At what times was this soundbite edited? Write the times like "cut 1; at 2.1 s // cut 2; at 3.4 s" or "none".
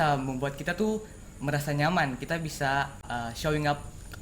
cut 1; at 3.1 s